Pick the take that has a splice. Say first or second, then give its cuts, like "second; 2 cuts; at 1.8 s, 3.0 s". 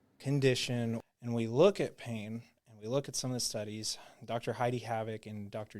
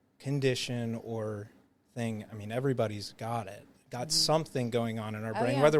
first; 1 cut; at 1.0 s